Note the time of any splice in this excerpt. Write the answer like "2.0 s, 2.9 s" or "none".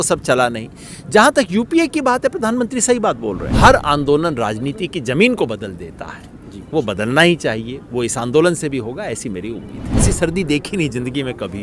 3.5 s, 10.0 s